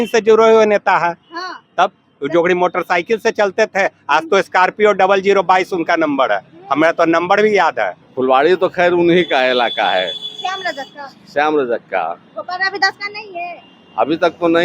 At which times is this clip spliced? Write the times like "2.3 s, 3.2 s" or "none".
8.0 s